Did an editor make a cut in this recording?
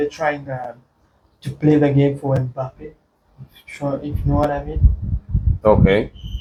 no; 0 cuts

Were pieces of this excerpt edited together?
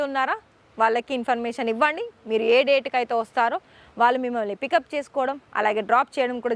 no; 0 cuts

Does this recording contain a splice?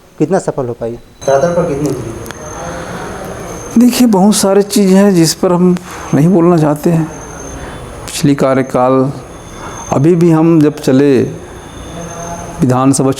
no; 0 cuts

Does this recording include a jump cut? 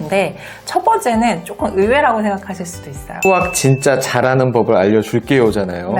yes; 1 cut; at 3.2 s

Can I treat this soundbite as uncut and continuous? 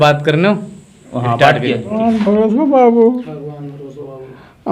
no; 1 cut; at 1.9 s

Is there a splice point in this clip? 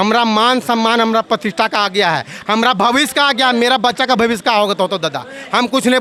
no; 0 cuts

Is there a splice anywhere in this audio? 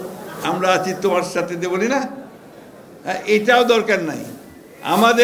no; 0 cuts

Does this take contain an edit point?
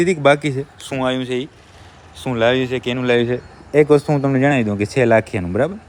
no; 0 cuts

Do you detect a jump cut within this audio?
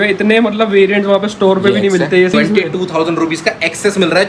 yes; 1 cut; at 2.3 s

